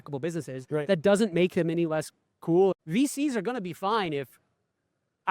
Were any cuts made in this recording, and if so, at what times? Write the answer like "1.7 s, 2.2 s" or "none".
2.8 s